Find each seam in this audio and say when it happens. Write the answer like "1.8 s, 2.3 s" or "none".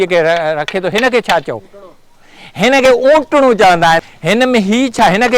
4.0 s